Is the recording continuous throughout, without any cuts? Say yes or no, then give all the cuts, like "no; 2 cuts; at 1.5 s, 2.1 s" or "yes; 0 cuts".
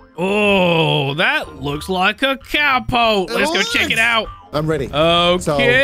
no; 1 cut; at 4.4 s